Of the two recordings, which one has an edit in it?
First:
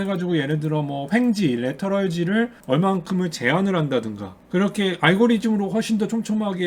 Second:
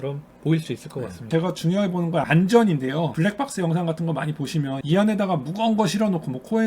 second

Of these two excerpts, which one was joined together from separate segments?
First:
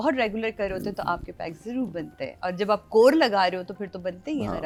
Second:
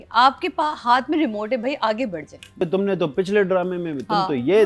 second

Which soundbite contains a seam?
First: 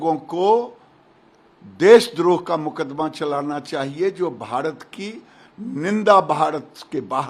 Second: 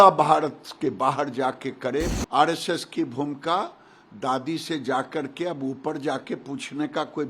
second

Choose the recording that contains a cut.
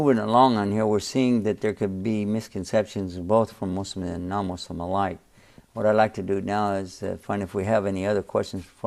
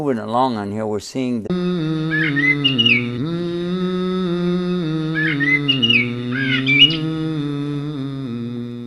first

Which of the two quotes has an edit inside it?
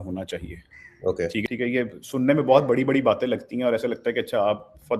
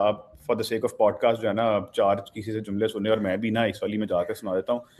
first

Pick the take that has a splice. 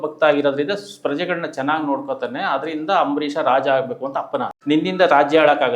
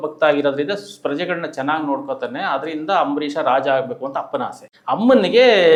first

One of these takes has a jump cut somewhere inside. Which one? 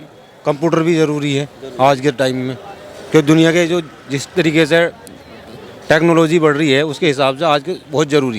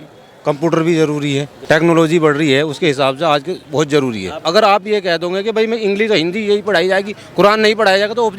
second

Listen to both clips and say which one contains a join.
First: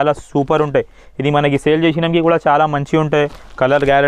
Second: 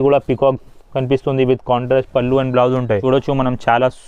second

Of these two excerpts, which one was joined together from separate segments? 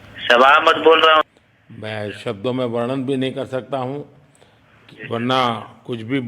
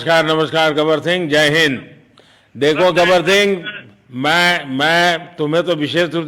first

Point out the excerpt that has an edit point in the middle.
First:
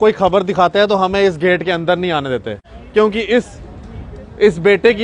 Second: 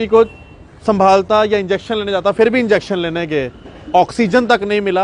first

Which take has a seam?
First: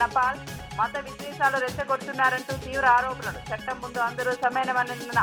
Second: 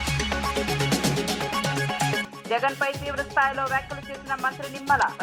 second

